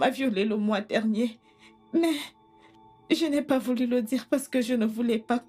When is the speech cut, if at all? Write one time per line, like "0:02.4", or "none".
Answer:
none